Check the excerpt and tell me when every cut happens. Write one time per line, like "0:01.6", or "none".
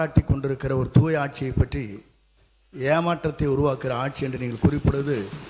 none

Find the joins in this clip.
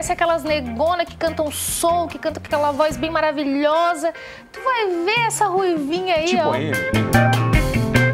0:06.8

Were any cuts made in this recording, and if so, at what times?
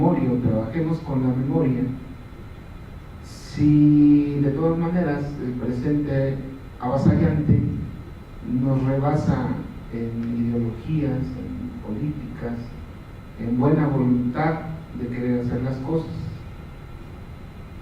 0:01.1

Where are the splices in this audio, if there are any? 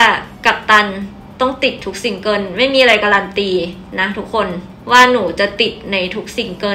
none

